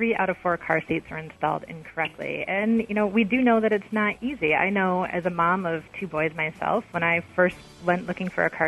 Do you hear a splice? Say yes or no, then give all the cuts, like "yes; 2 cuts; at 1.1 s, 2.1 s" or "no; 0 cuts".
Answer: no; 0 cuts